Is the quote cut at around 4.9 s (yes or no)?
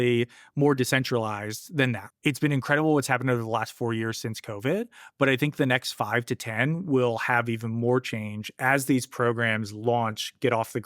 no